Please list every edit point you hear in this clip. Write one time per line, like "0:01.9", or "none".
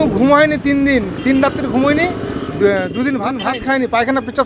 0:03.4